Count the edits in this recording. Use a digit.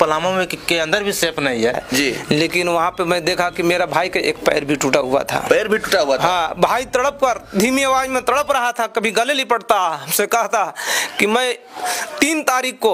1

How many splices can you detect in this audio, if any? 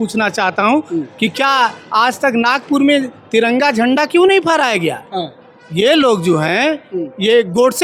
0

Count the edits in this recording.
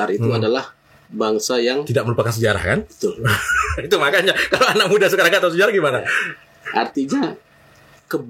0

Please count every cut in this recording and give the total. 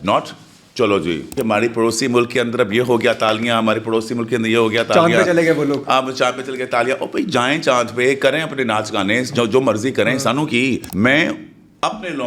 2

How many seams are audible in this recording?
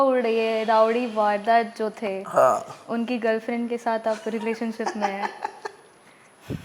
0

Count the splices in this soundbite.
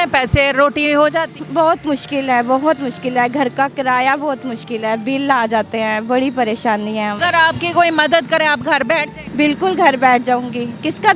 3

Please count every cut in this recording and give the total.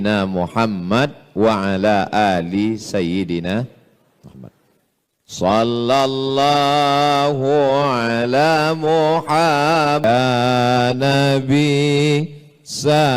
1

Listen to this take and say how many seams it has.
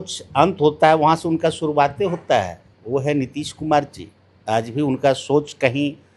0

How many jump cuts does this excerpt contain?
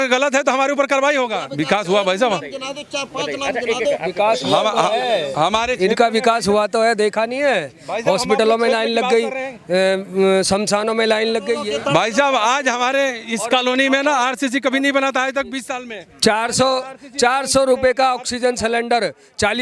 2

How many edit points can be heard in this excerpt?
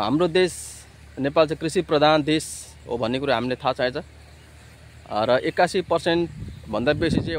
0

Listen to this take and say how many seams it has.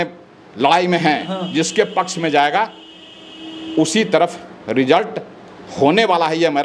0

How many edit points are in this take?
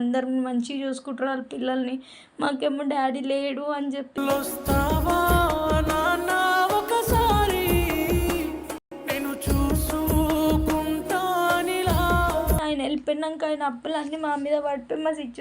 1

